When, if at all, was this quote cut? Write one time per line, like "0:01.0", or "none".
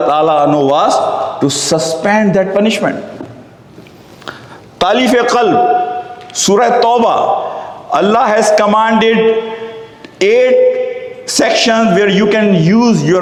none